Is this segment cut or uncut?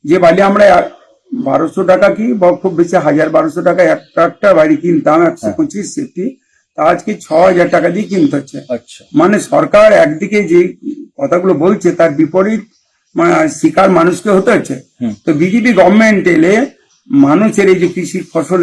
uncut